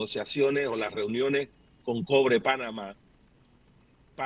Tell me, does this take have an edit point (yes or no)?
no